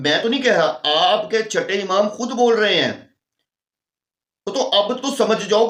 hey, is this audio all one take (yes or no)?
yes